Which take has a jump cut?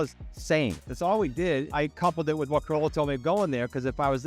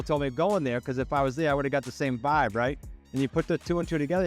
first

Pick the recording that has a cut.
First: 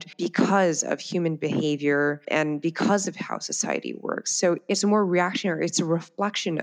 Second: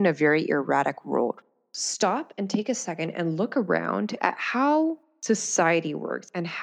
second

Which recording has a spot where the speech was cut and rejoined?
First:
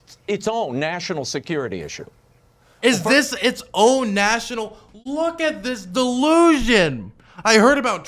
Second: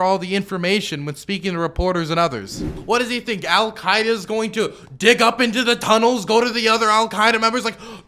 second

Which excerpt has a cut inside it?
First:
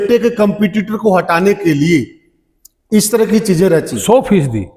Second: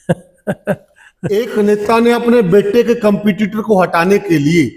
second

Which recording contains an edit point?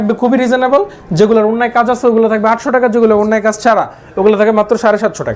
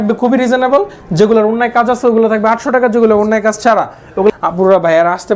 second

